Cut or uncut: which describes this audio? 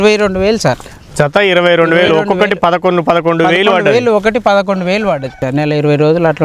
cut